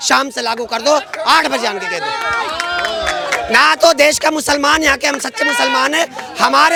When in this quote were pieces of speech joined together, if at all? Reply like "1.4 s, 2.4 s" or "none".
none